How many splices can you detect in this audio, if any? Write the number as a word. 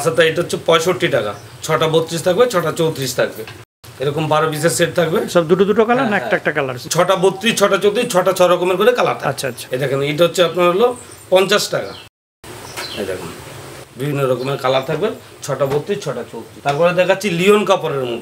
zero